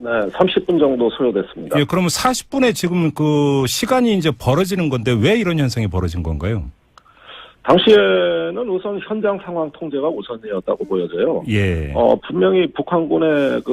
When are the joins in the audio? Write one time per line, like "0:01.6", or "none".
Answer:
0:02.2